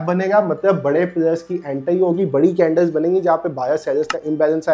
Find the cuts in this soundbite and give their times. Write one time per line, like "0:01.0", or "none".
none